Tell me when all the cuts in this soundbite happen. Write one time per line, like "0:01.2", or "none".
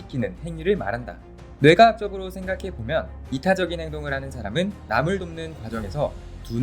0:01.4